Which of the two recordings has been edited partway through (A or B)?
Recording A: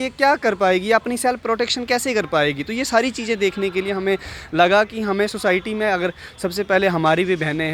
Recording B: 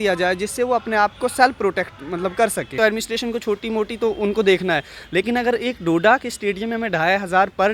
B